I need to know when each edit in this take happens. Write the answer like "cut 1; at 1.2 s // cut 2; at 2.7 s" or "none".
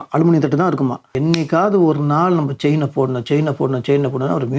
cut 1; at 1.2 s